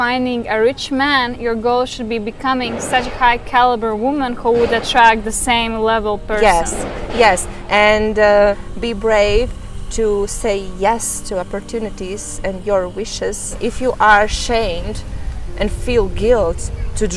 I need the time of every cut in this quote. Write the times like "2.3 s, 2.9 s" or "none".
8.7 s, 13.6 s